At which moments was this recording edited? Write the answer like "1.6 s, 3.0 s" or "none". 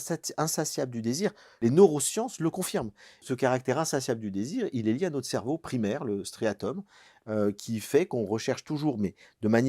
1.6 s, 3.2 s